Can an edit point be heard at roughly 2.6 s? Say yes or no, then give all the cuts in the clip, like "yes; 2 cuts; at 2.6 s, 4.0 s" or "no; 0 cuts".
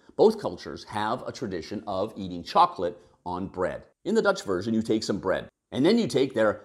no; 2 cuts; at 3.9 s, 5.5 s